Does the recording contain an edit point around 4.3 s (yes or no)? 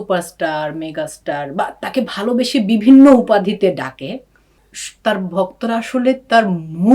no